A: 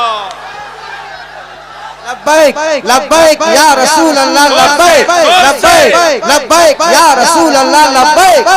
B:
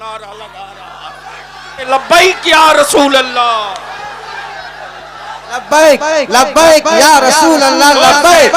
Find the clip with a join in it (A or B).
B